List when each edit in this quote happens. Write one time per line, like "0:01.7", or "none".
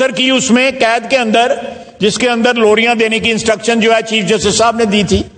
none